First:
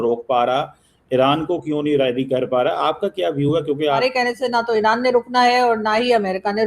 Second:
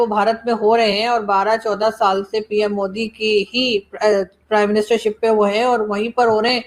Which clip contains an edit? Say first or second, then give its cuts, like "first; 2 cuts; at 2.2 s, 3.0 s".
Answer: first; 1 cut; at 4.0 s